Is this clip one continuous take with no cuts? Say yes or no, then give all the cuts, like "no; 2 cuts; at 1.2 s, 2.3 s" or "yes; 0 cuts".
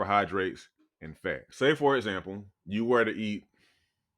no; 1 cut; at 1.5 s